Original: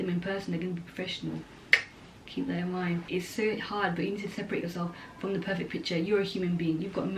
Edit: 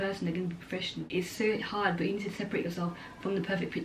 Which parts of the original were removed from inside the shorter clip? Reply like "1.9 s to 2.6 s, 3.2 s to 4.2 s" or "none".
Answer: 1.3 s to 3.0 s